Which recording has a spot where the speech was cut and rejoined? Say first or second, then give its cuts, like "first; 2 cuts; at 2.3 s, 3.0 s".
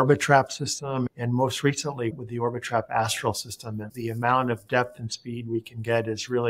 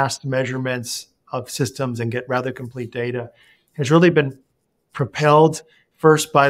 first; 3 cuts; at 1.1 s, 2.1 s, 3.9 s